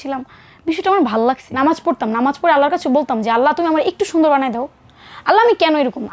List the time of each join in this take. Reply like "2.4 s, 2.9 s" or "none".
1.5 s